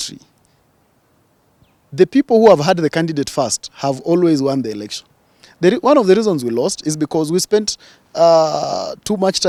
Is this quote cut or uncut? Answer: uncut